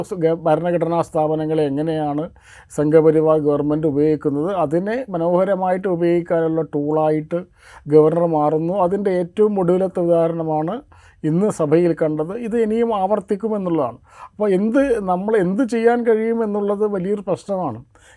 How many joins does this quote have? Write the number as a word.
zero